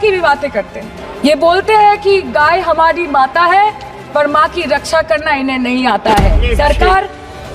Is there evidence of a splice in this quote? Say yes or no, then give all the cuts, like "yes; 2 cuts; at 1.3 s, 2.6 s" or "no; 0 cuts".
yes; 2 cuts; at 1.0 s, 6.5 s